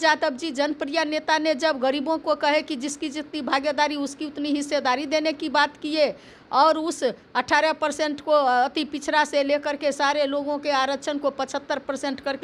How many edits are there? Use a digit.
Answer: 0